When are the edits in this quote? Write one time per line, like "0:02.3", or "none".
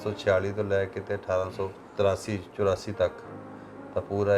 0:01.8